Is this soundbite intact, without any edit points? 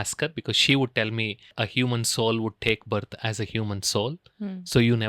no; 1 cut; at 1.4 s

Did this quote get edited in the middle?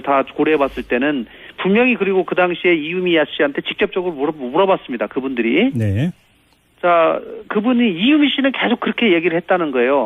no; 0 cuts

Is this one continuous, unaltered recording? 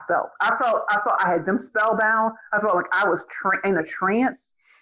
yes; 0 cuts

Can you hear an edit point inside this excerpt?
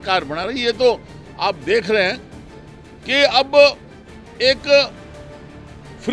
no; 0 cuts

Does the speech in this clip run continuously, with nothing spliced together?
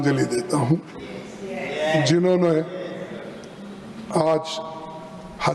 yes; 0 cuts

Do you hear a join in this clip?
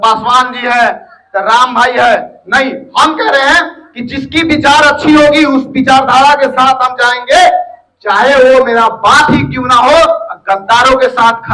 no; 0 cuts

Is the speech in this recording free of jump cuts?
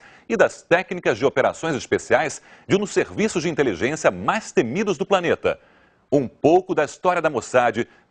no; 1 cut; at 1.5 s

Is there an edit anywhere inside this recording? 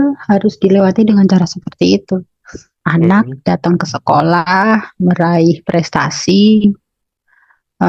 yes; 1 cut; at 2.7 s

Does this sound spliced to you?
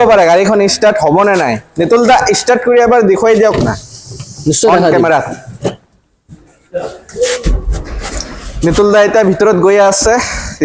no; 0 cuts

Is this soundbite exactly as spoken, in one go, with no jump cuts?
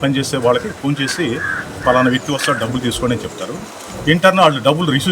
yes; 0 cuts

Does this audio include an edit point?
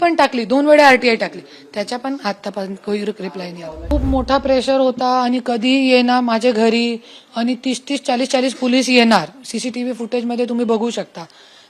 yes; 1 cut; at 3.9 s

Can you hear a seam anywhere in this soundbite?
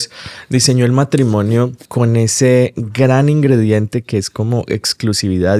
yes; 1 cut; at 1.8 s

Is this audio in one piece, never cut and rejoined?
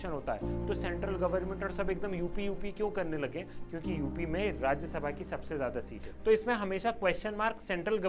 no; 1 cut; at 6.1 s

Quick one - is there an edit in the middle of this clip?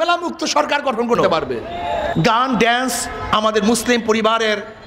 yes; 1 cut; at 2.1 s

